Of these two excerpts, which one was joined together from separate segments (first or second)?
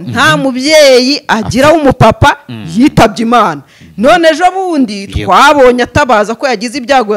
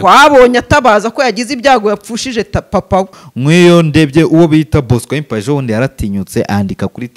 second